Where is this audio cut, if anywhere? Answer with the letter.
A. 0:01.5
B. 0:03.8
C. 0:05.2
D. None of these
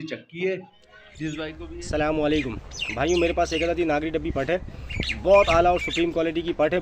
A